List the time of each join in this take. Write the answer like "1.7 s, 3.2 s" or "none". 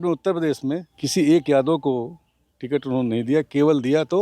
0.9 s

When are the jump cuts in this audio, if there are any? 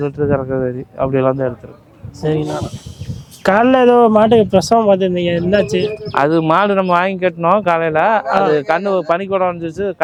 none

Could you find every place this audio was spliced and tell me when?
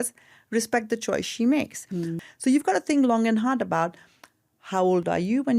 2.1 s

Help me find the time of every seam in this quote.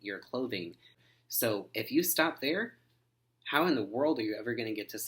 0.9 s

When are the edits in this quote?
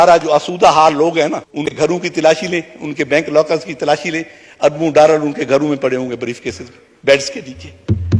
1.8 s

